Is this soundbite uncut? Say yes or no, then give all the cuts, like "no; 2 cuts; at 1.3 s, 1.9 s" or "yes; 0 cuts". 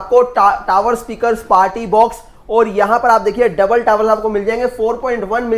yes; 0 cuts